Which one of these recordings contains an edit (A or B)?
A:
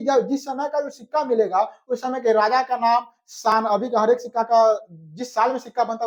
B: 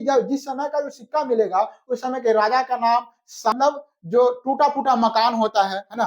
B